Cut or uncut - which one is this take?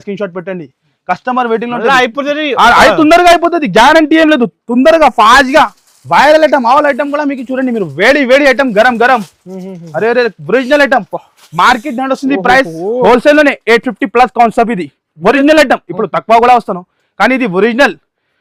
uncut